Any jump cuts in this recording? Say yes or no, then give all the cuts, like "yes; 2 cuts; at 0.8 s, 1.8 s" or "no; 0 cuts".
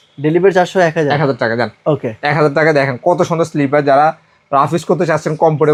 no; 0 cuts